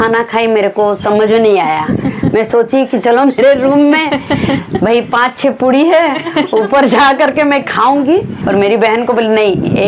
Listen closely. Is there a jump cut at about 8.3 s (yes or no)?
yes